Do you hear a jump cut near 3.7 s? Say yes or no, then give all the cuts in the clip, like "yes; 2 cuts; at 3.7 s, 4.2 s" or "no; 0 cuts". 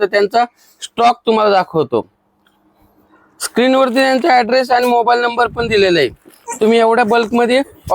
no; 0 cuts